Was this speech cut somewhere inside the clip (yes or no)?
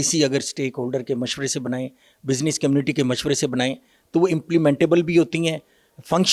no